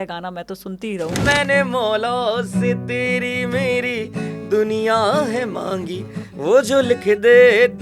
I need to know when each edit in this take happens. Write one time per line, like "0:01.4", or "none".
0:01.2